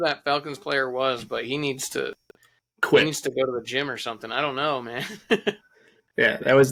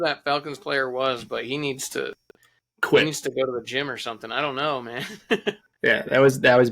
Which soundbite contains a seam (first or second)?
second